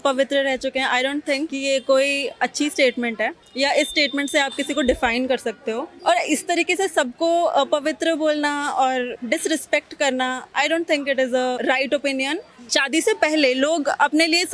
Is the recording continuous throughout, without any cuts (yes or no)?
no